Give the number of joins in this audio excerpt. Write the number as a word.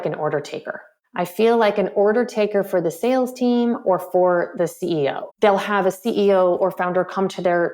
one